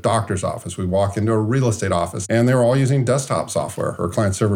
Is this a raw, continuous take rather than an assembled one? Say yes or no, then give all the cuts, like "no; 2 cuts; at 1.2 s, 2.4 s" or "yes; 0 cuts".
no; 1 cut; at 2.2 s